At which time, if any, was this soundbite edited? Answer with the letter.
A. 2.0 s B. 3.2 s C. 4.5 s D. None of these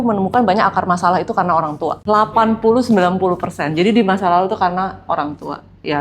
A